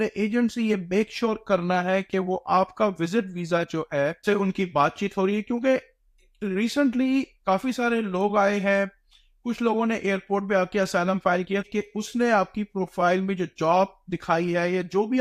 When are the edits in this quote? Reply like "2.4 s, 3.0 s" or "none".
4.2 s, 11.6 s